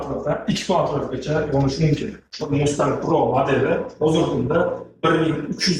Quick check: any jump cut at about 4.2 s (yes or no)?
no